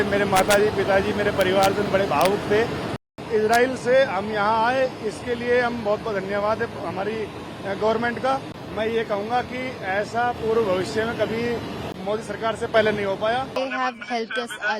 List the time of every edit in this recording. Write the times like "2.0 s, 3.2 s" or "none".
3.2 s, 8.6 s, 13.6 s